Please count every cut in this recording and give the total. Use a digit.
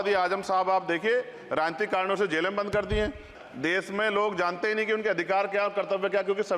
1